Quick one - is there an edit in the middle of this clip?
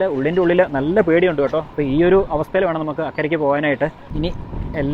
yes; 2 cuts; at 1.7 s, 4.0 s

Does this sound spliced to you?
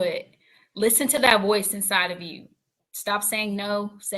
no; 0 cuts

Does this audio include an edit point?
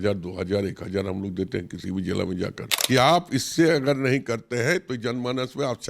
yes; 1 cut; at 2.7 s

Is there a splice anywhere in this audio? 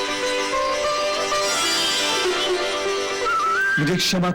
yes; 1 cut; at 1.5 s

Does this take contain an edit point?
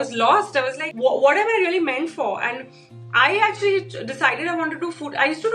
no; 0 cuts

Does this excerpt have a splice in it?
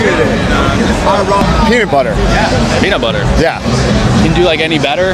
no; 0 cuts

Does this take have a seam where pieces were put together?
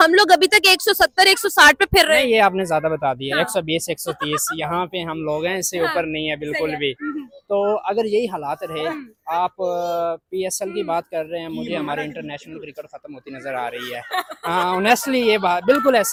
no; 0 cuts

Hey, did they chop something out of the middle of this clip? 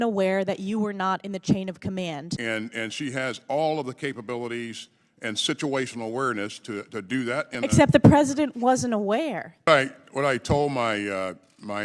yes; 2 cuts; at 2.3 s, 9.7 s

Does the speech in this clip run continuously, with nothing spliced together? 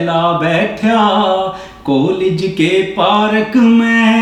yes; 0 cuts

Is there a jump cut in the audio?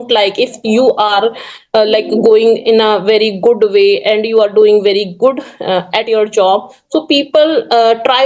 no; 0 cuts

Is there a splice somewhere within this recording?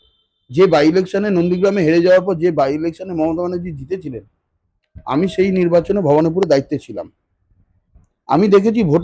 no; 0 cuts

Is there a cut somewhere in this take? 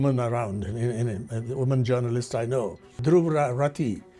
yes; 1 cut; at 2.8 s

